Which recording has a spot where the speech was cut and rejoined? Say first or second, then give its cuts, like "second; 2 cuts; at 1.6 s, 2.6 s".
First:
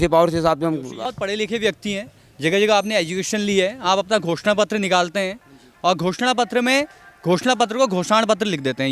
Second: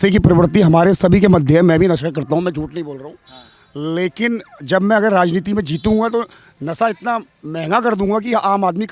first; 1 cut; at 1.1 s